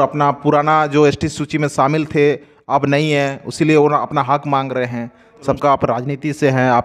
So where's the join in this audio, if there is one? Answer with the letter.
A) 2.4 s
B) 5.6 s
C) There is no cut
B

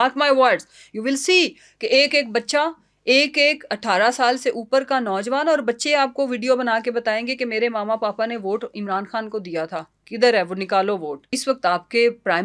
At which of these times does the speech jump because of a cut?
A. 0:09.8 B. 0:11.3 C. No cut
B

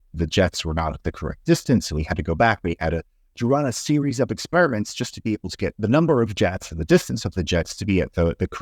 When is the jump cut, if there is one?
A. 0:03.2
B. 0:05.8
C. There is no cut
B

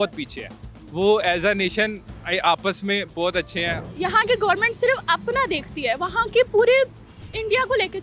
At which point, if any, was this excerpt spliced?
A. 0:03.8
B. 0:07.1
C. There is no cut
A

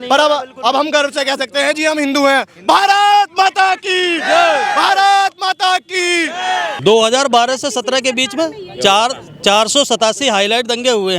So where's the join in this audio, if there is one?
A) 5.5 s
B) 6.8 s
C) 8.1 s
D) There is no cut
B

